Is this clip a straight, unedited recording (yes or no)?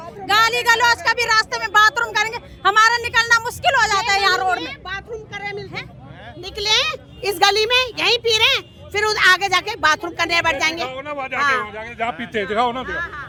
yes